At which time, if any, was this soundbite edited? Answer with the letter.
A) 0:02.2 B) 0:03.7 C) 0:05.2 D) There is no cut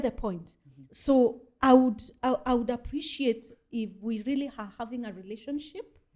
D